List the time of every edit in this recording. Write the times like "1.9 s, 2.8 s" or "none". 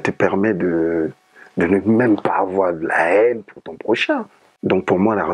4.4 s